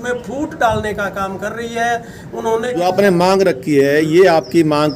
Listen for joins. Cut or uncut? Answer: cut